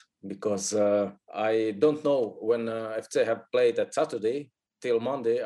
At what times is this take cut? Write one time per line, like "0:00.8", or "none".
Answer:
0:01.2